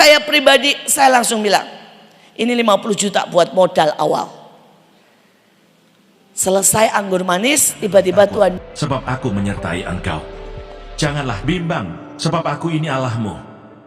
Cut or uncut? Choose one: cut